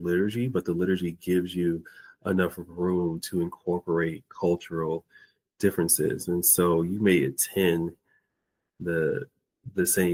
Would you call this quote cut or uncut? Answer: uncut